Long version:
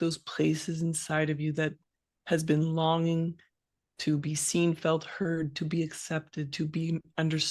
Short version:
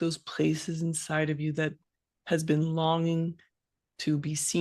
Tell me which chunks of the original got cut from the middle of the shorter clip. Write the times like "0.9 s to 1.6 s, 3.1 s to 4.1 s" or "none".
none